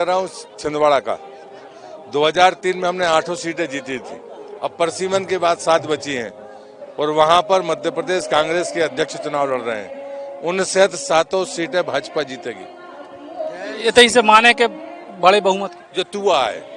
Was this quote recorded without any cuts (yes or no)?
yes